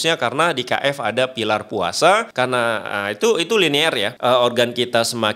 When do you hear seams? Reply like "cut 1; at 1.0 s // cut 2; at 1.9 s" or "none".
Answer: cut 1; at 2.3 s // cut 2; at 4.1 s

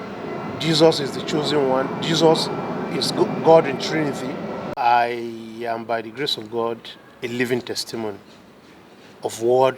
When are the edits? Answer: cut 1; at 4.7 s

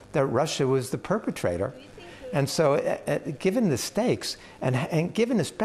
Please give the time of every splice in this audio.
none

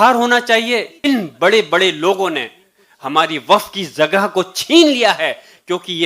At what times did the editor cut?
cut 1; at 1.0 s

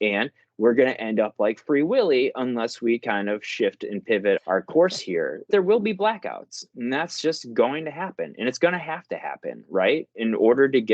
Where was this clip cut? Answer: cut 1; at 4.4 s // cut 2; at 5.5 s

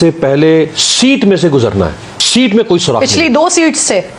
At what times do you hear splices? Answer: cut 1; at 2.1 s

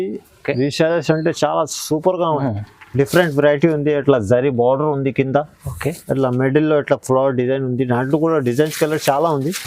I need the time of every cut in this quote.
cut 1; at 2.4 s

